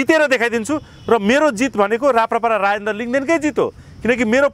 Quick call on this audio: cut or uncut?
uncut